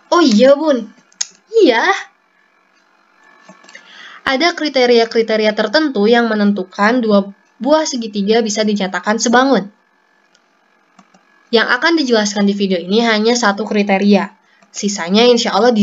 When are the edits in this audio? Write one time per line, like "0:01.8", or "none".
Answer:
0:03.2